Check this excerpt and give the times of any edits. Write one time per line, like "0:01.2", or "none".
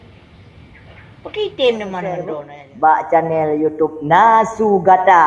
0:02.1